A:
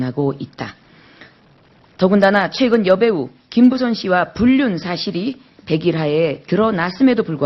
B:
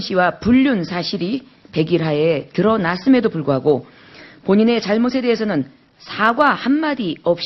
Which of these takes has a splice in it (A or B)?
A